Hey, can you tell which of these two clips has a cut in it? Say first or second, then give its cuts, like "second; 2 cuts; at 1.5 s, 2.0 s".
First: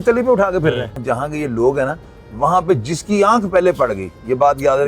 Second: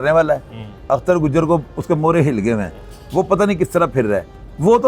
first; 1 cut; at 1.0 s